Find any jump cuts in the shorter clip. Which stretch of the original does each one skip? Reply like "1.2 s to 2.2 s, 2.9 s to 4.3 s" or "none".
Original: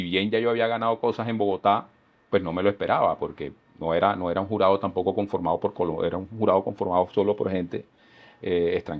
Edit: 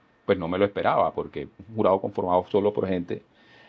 3.7 s to 6.2 s